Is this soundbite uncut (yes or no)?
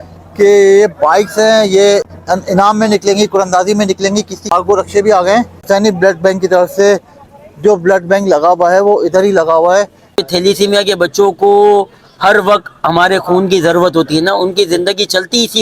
no